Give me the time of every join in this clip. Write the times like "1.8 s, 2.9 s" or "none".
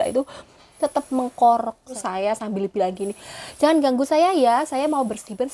2.0 s